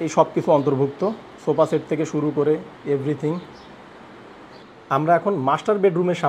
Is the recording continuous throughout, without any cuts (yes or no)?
no